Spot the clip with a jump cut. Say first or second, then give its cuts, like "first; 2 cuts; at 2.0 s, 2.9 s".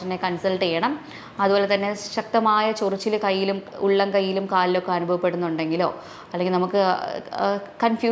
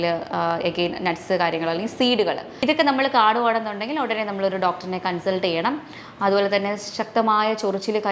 second; 1 cut; at 2.5 s